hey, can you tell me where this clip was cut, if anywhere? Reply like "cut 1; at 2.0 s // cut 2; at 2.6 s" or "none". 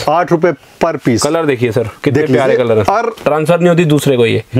cut 1; at 3.1 s